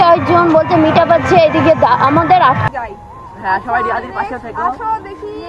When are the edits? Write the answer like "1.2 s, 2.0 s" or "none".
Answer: 2.6 s